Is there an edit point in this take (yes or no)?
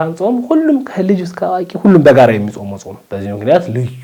no